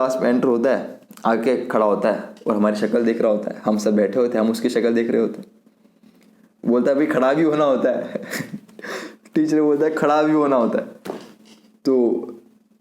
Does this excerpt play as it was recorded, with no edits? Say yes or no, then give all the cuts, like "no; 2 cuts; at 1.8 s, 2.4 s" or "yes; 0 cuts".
yes; 0 cuts